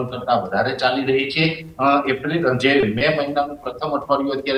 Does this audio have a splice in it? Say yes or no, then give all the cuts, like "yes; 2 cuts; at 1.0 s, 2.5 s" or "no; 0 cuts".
no; 0 cuts